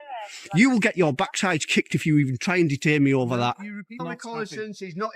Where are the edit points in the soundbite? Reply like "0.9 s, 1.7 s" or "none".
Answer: 3.7 s

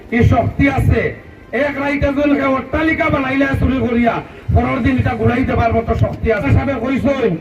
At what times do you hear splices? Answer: 6.4 s

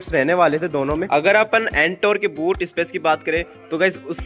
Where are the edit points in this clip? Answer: 1.0 s

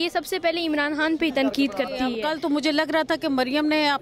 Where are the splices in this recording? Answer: 2.1 s

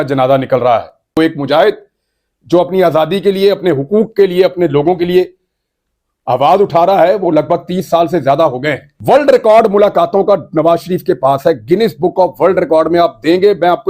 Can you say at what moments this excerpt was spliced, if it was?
1.2 s, 8.9 s

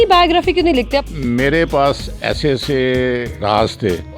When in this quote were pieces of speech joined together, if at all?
1.0 s

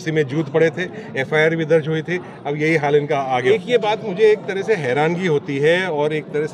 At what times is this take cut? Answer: 3.4 s

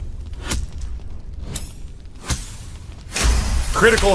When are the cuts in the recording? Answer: none

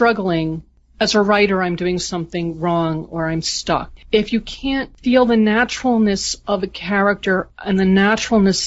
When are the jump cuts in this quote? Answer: 4.0 s

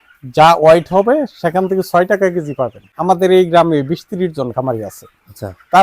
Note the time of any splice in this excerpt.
2.8 s

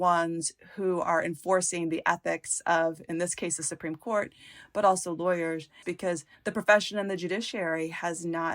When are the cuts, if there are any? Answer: 5.9 s

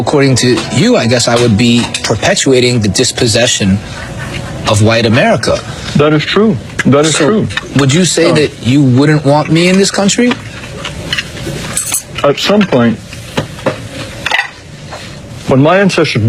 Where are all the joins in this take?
none

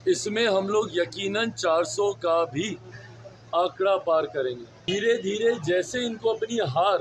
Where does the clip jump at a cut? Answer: 4.7 s

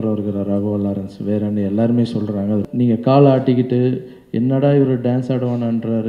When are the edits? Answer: 2.7 s

